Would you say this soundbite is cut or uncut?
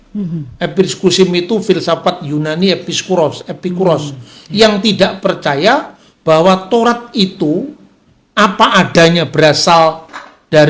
uncut